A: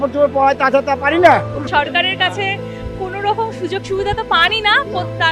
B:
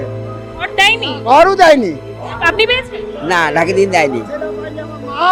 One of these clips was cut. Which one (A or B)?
A